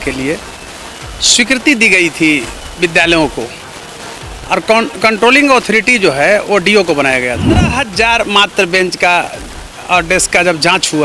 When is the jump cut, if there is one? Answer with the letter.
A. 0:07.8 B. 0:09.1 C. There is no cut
A